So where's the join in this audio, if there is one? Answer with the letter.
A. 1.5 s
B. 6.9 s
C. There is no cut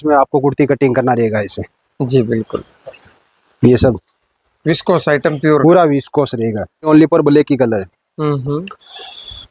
B